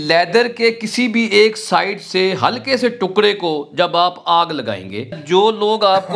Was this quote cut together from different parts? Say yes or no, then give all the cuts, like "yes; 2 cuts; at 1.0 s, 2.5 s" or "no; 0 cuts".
yes; 1 cut; at 5.1 s